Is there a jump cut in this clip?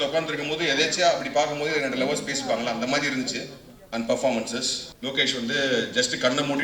yes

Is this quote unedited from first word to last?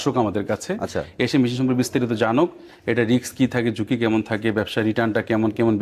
yes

